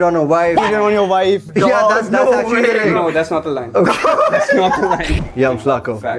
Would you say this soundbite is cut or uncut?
cut